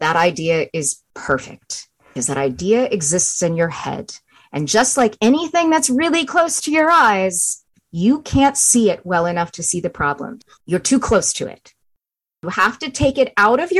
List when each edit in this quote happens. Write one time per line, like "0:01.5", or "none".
0:02.1
0:10.4

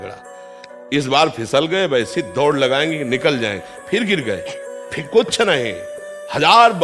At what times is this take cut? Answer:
none

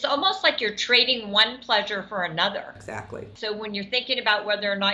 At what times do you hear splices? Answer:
0:03.3

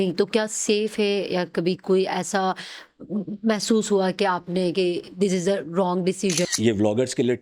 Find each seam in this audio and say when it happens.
0:06.5

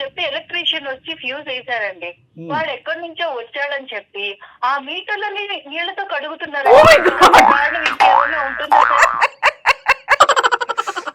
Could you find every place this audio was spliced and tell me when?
none

